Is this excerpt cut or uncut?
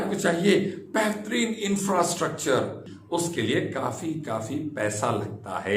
cut